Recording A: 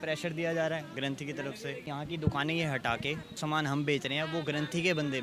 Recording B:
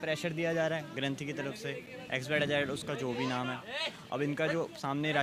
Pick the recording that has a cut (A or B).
A